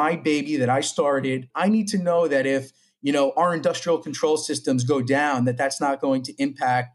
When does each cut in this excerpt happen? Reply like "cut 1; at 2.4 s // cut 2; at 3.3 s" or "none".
cut 1; at 1.5 s